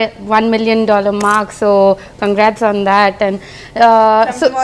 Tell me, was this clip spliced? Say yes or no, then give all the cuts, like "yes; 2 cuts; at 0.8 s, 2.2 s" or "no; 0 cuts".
no; 0 cuts